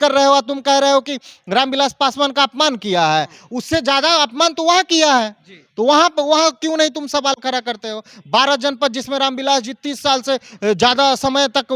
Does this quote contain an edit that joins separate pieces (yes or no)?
no